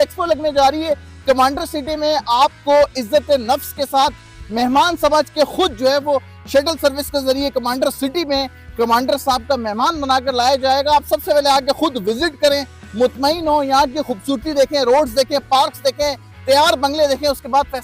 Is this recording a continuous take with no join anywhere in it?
yes; 0 cuts

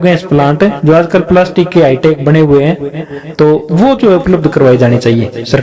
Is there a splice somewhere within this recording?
no; 0 cuts

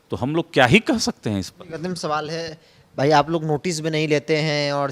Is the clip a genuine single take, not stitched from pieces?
yes; 0 cuts

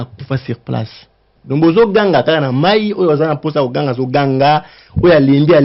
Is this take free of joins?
no; 1 cut; at 1.3 s

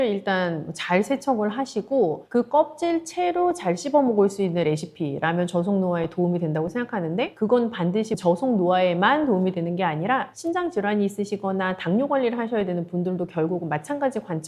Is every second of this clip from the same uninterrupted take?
yes; 0 cuts

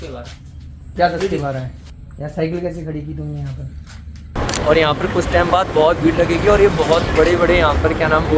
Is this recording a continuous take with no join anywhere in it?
no; 1 cut; at 4.4 s

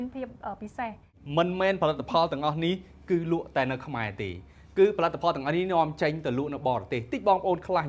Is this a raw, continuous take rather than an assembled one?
no; 1 cut; at 1.2 s

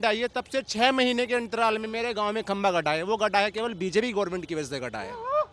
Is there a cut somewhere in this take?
no; 0 cuts

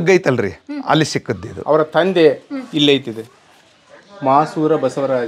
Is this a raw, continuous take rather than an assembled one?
yes; 0 cuts

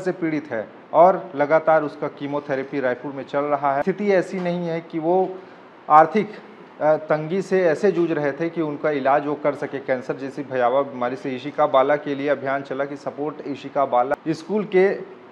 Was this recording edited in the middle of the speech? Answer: yes; 2 cuts; at 3.8 s, 14.1 s

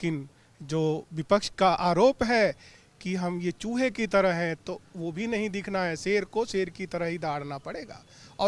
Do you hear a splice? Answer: no; 0 cuts

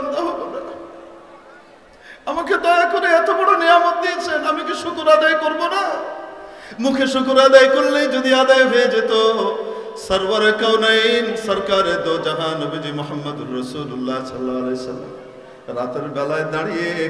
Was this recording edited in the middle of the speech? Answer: no; 0 cuts

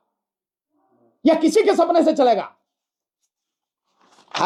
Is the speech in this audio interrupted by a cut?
no; 0 cuts

